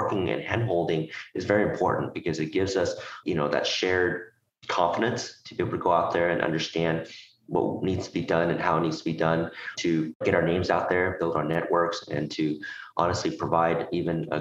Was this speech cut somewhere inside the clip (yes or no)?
yes